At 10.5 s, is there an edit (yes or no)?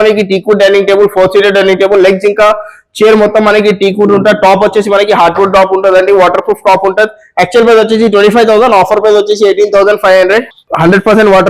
yes